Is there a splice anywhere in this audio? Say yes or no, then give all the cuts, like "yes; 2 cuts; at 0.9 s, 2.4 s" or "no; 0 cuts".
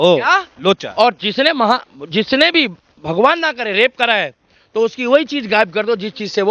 no; 0 cuts